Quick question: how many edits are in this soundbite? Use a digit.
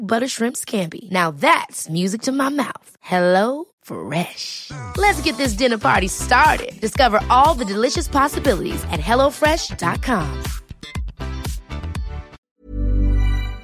1